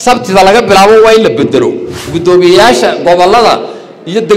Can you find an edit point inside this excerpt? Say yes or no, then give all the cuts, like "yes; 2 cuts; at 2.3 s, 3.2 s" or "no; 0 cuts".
yes; 1 cut; at 2.1 s